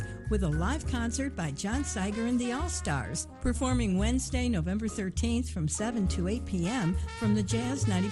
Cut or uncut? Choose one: uncut